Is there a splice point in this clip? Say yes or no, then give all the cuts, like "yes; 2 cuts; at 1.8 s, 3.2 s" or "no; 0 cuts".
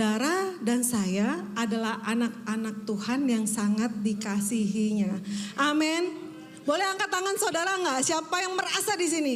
no; 0 cuts